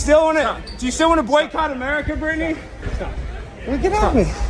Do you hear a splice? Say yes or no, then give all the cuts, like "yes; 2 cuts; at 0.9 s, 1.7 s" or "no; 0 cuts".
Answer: no; 0 cuts